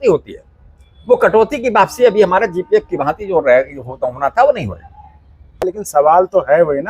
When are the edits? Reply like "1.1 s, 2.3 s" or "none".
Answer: 5.6 s